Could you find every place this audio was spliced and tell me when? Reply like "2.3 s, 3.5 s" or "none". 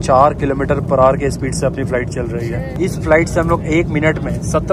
none